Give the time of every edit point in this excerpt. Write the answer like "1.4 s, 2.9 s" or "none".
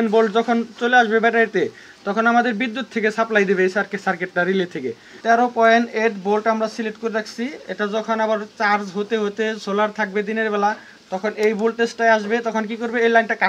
5.1 s